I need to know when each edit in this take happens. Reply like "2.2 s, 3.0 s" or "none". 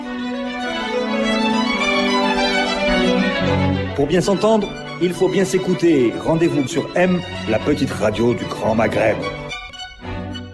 9.6 s